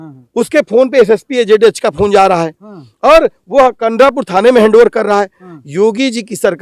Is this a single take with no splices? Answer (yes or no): yes